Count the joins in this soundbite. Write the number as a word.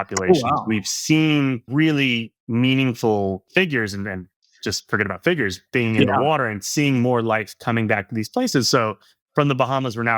two